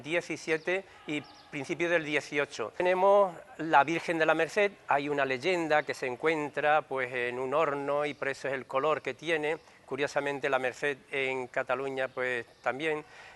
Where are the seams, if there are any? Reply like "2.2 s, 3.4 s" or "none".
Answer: 2.8 s